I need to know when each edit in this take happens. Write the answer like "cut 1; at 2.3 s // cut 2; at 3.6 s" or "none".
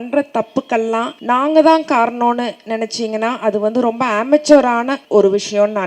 cut 1; at 1.1 s // cut 2; at 5.0 s

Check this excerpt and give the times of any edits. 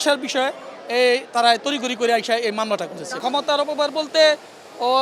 cut 1; at 3.2 s

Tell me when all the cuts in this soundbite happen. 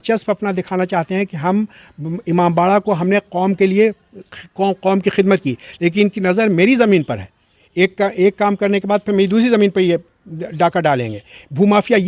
none

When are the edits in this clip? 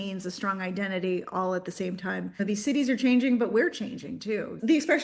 cut 1; at 2.4 s

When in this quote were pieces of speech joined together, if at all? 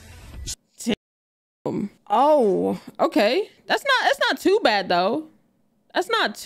cut 1; at 3.6 s

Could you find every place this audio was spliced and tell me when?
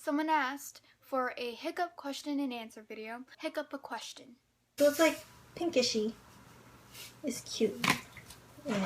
cut 1; at 3.3 s // cut 2; at 4.8 s

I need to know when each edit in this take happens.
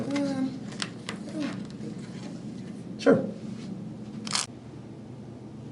cut 1; at 4.4 s

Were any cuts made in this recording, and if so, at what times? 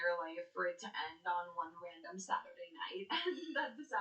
cut 1; at 3.1 s

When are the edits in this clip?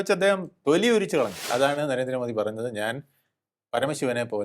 cut 1; at 1.5 s

